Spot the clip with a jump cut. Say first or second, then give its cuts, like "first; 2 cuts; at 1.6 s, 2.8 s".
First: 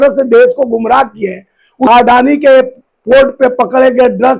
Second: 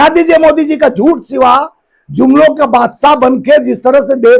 first; 1 cut; at 1.9 s